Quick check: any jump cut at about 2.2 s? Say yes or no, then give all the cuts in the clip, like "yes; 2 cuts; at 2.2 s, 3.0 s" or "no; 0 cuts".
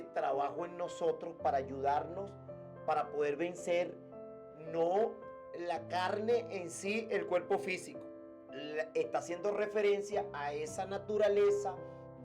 no; 0 cuts